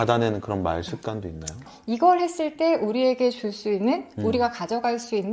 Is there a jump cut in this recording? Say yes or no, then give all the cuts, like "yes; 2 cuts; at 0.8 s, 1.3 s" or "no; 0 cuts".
yes; 1 cut; at 1.7 s